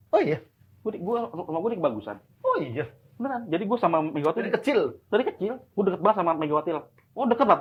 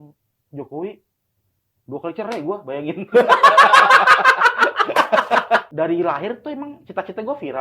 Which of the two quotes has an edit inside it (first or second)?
second